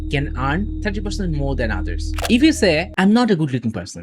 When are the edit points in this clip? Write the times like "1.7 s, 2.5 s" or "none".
2.3 s